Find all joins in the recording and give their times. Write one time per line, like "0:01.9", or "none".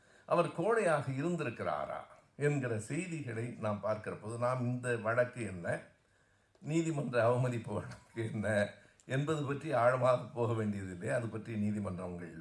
none